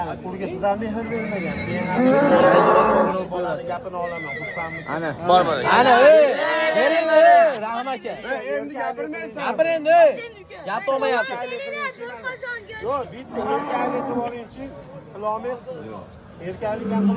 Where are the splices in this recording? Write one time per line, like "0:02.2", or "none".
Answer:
none